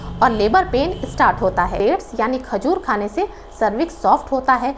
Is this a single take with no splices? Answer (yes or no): no